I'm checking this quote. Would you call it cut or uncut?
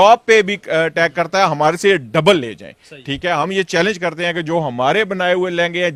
uncut